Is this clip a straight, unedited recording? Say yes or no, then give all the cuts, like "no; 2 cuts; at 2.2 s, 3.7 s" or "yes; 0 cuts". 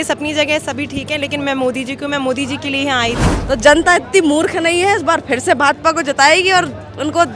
no; 1 cut; at 3.3 s